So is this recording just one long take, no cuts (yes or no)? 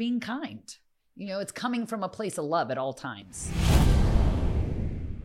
no